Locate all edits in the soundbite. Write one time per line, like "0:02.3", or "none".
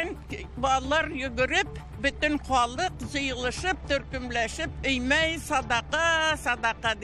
none